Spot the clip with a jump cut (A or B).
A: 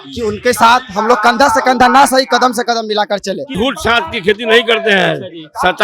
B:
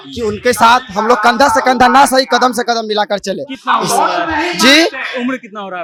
A